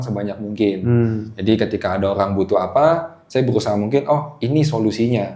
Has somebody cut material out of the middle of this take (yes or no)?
no